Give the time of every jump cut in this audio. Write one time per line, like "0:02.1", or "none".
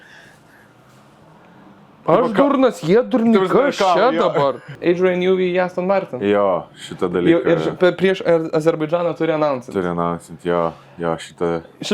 0:04.7